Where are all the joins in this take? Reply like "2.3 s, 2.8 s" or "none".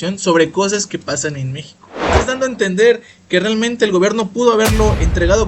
2.2 s